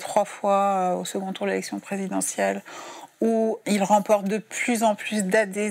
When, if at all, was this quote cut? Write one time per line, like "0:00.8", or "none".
0:03.6